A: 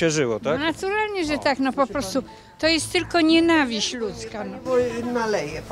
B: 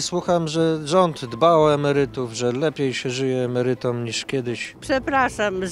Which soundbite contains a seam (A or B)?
B